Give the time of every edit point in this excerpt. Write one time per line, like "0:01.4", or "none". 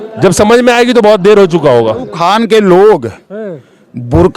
0:02.1